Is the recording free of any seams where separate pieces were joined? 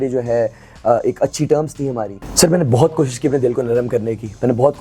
no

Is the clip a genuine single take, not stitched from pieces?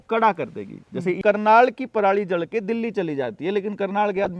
no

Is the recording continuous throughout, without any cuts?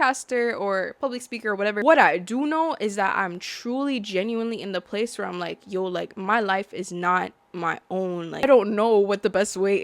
no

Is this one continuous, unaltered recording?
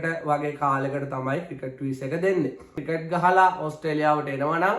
no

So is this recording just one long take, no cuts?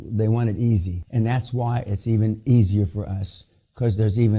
no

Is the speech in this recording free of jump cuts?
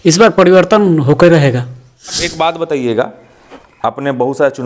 no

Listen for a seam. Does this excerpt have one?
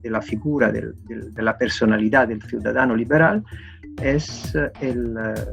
yes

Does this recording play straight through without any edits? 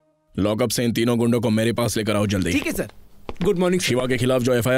yes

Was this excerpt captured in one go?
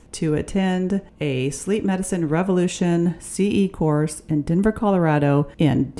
yes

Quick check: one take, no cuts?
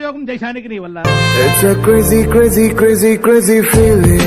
no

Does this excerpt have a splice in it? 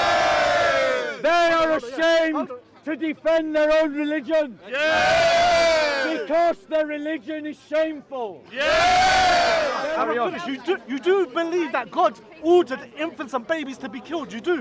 yes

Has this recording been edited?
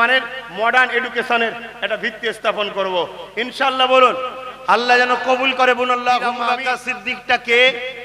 yes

